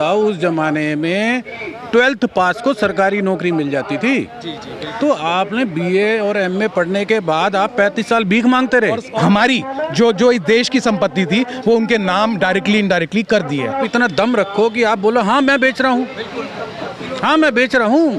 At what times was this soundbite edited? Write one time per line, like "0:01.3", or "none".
0:09.1
0:13.8